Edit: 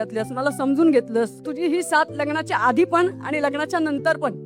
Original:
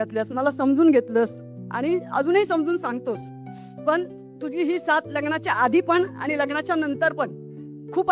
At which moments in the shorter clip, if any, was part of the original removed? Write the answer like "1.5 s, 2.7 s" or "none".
1.4 s